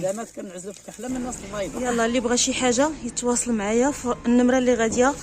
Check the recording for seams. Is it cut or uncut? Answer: cut